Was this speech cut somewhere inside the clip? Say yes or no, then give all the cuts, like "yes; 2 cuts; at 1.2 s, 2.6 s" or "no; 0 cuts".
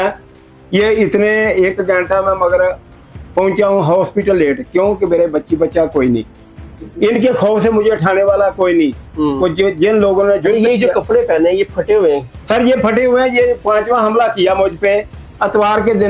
no; 0 cuts